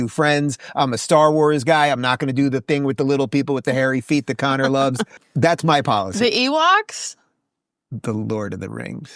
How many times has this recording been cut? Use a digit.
1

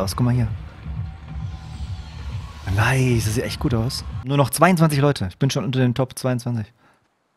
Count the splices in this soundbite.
1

